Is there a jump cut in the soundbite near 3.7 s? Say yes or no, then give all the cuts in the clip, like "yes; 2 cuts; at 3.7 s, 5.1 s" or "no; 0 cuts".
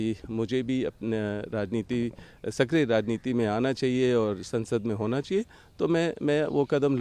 no; 0 cuts